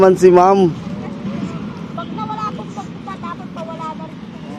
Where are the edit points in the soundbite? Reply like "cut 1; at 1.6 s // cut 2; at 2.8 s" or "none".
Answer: none